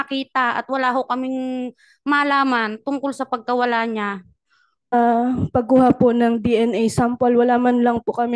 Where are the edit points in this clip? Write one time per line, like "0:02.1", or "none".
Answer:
0:04.9